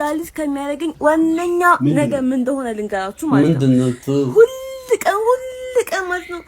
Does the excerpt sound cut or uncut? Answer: cut